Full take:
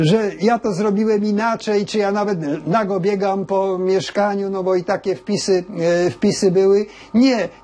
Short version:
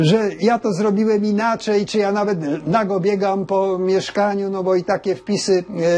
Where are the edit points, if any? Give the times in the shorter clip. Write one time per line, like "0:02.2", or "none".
none